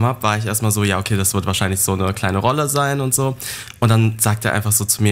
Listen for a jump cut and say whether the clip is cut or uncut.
uncut